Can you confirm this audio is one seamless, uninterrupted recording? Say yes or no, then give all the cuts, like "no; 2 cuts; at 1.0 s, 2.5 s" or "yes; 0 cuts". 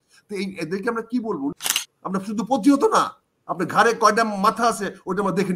no; 1 cut; at 1.6 s